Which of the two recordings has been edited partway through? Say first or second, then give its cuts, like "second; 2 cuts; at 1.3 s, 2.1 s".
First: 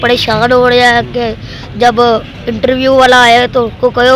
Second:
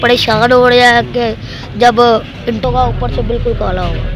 second; 1 cut; at 2.6 s